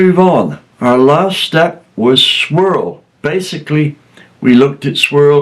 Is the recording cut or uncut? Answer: cut